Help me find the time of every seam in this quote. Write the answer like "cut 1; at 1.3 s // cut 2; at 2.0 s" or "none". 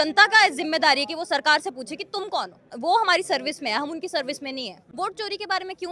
cut 1; at 2.7 s // cut 2; at 4.9 s